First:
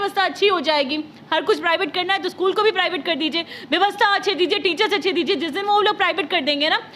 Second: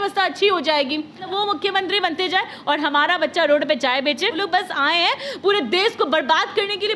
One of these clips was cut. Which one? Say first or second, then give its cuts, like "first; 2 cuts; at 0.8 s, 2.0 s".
second; 2 cuts; at 1.2 s, 4.4 s